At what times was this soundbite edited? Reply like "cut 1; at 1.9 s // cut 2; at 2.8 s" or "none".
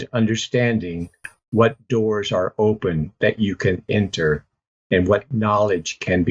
none